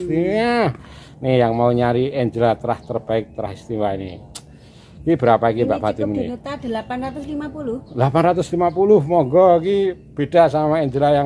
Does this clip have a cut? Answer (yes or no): no